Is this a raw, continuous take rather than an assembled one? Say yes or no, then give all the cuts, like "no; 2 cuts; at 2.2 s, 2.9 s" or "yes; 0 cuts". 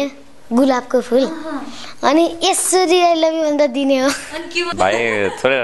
no; 1 cut; at 4.7 s